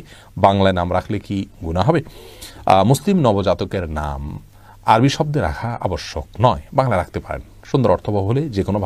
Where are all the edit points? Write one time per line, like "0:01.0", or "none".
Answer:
none